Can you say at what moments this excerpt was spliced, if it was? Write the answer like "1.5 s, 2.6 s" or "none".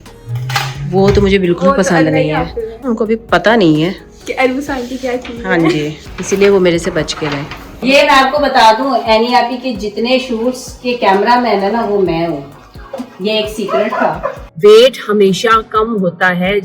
2.9 s, 6.1 s, 7.8 s, 14.4 s